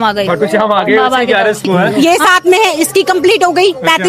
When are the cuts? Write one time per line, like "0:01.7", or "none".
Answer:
0:01.9